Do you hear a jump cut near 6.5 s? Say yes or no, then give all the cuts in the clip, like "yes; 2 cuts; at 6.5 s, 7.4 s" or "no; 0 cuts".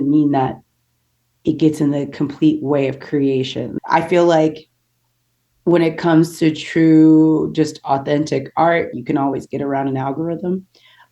no; 2 cuts; at 3.6 s, 8.9 s